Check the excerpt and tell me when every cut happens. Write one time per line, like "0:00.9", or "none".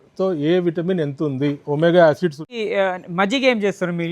0:02.5